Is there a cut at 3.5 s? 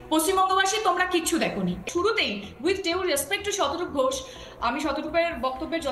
no; 1 cut; at 1.8 s

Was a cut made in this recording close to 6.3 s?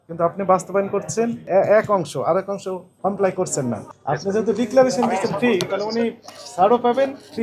no; 3 cuts; at 1.4 s, 2.9 s, 3.9 s

